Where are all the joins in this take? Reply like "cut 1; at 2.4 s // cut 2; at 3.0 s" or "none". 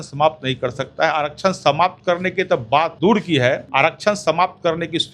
cut 1; at 2.9 s // cut 2; at 3.6 s